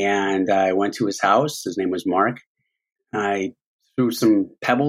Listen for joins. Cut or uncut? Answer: cut